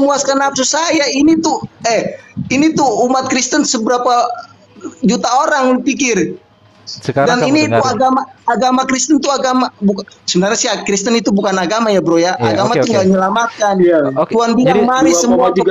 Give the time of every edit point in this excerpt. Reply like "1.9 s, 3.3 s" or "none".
none